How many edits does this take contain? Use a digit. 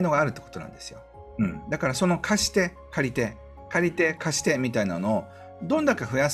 1